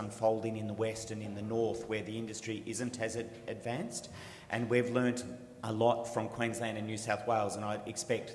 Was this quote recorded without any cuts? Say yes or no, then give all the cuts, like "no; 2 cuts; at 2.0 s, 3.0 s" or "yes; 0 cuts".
yes; 0 cuts